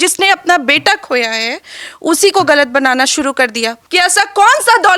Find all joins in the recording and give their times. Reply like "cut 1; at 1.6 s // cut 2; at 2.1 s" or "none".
cut 1; at 3.8 s